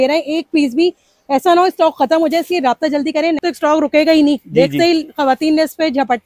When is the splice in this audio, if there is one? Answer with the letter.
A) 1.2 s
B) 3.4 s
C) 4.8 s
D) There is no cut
B